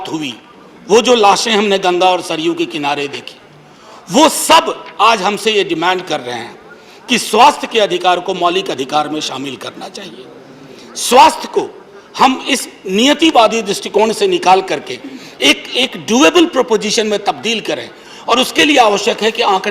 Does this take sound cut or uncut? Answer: uncut